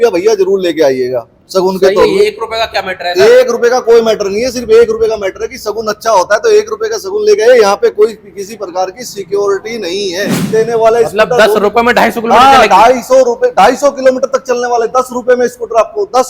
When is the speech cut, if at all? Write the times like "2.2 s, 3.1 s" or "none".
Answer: 10.5 s